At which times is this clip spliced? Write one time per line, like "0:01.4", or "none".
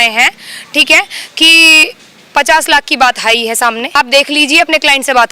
0:03.9